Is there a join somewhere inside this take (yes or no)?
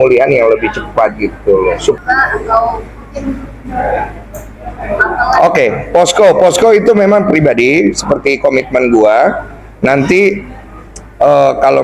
yes